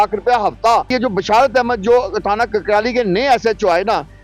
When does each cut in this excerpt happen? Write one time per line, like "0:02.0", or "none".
0:00.9